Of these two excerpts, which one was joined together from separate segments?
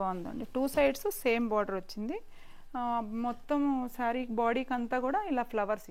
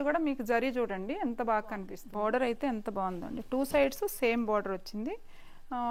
second; 1 cut; at 2.0 s

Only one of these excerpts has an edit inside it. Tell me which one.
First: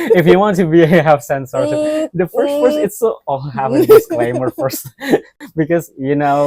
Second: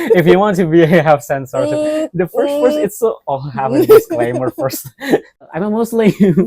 second; 1 cut; at 5.5 s

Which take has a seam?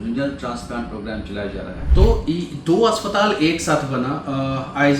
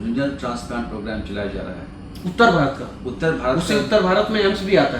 first; 1 cut; at 1.8 s

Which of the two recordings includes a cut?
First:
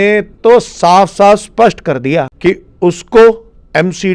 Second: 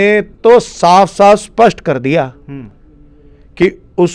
first; 1 cut; at 2.3 s

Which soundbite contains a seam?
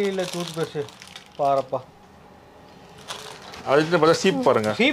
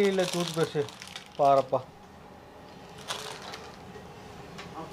first; 1 cut; at 3.5 s

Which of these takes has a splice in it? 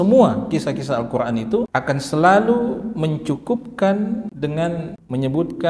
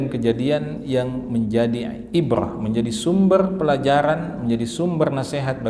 first; 2 cuts; at 1.7 s, 4.6 s

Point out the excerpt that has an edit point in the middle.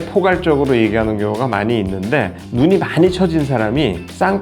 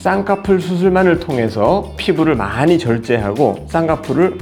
first; 1 cut; at 2.4 s

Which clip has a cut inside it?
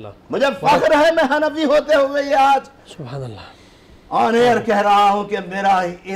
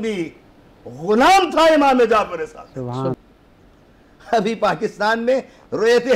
second; 1 cut; at 3.2 s

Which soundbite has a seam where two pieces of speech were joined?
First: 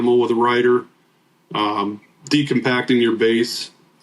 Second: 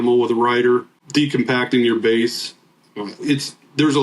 second; 1 cut; at 1.0 s

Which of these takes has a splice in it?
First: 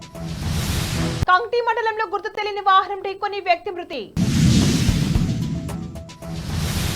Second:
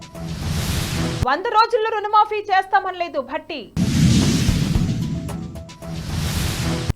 second; 1 cut; at 1.0 s

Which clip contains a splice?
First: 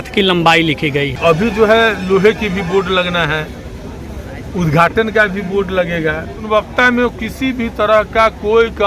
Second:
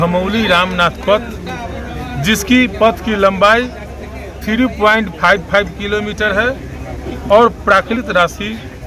first; 2 cuts; at 1.1 s, 6.5 s

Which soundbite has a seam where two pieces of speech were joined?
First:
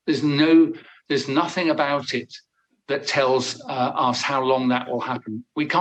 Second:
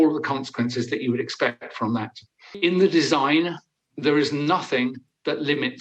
second; 1 cut; at 2.6 s

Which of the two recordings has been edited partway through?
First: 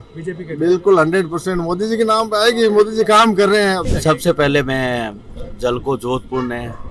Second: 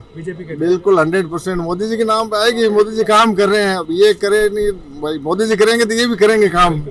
first; 1 cut; at 3.8 s

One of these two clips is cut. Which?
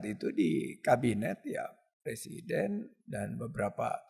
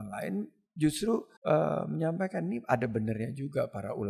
second; 1 cut; at 1.3 s

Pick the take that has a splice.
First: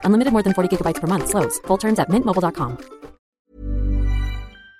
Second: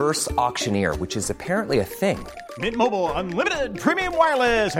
first; 1 cut; at 3.3 s

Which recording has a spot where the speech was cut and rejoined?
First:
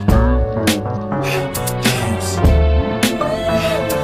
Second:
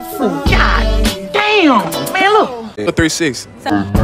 second; 1 cut; at 2.9 s

